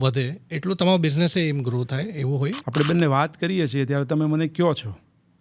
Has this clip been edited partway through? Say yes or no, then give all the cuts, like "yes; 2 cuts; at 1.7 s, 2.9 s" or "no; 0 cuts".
yes; 1 cut; at 2.6 s